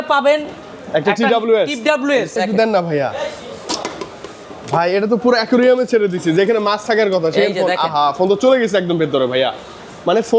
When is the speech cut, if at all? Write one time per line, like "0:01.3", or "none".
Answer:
0:02.3